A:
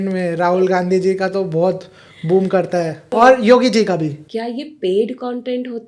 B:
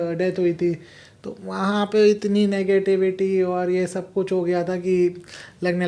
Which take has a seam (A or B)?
A